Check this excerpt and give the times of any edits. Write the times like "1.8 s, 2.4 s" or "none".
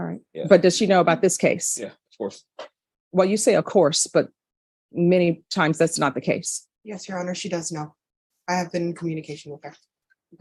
none